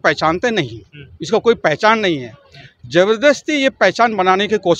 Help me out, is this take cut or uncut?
uncut